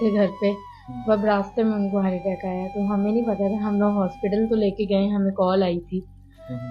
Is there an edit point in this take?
no; 0 cuts

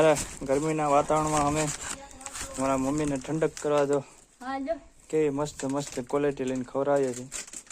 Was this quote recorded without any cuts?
yes; 0 cuts

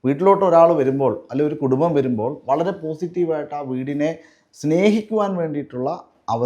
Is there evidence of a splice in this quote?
no; 0 cuts

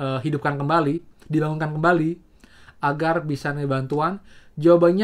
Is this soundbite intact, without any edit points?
yes; 0 cuts

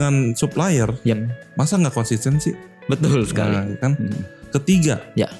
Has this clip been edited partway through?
no; 0 cuts

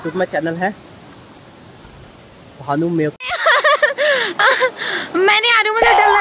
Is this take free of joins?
no; 1 cut; at 3.1 s

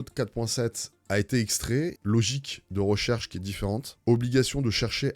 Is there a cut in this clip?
yes; 1 cut; at 2.0 s

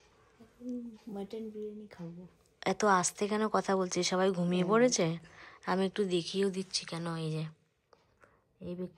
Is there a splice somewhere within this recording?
no; 0 cuts

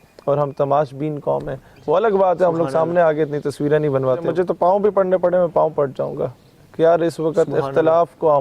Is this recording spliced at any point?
yes; 2 cuts; at 1.7 s, 4.3 s

